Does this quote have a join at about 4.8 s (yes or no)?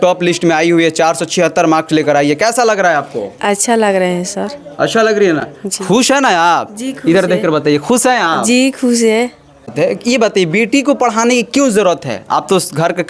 no